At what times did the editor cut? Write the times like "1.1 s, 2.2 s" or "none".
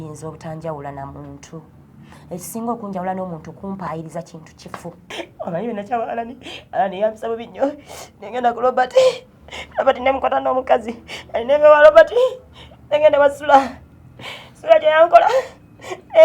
5.2 s